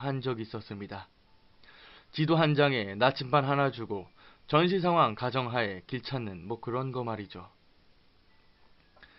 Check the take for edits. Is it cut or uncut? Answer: cut